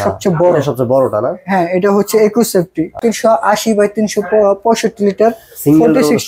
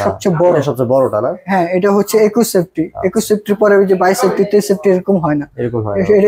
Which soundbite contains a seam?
first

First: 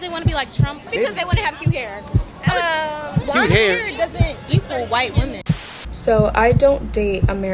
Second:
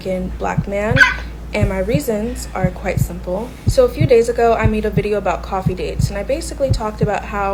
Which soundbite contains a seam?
first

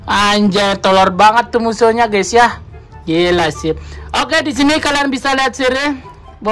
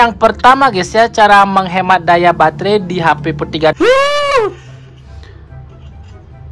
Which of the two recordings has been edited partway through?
second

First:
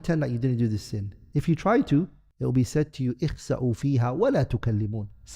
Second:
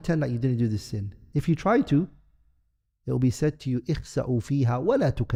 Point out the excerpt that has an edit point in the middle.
first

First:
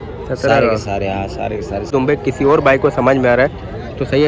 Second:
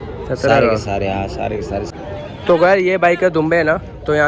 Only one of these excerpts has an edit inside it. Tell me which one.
first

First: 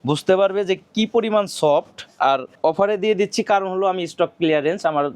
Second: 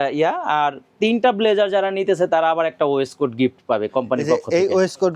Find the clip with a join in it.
first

